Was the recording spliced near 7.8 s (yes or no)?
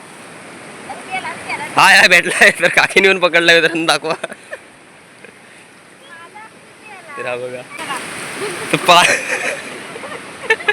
yes